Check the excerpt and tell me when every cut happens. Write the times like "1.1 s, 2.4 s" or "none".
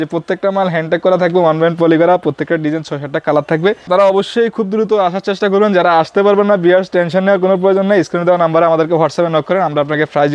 3.9 s